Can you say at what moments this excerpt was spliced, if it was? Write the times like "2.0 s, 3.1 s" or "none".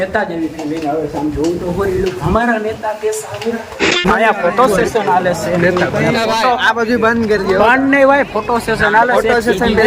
4.0 s